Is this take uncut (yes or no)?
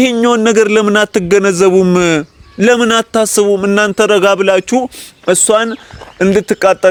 yes